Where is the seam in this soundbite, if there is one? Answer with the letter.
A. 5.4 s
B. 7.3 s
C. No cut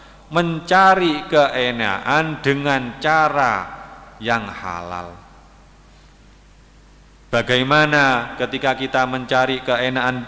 C